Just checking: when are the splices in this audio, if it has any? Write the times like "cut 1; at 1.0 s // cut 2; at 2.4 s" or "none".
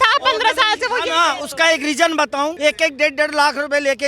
cut 1; at 2.5 s